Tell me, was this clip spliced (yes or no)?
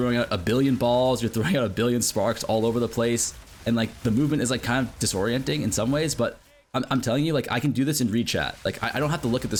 no